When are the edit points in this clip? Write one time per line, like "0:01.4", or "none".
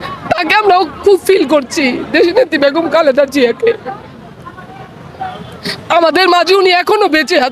none